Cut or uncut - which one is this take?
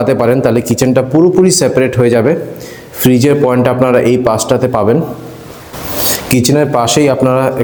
uncut